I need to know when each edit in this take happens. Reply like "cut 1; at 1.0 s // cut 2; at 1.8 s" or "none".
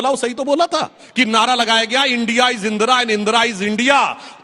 cut 1; at 1.0 s